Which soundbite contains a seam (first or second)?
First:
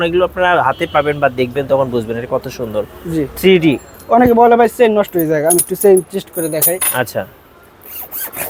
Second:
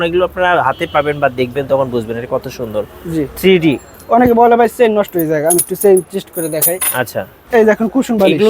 second